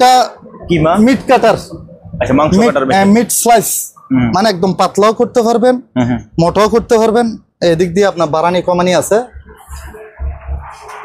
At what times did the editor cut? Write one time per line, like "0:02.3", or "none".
none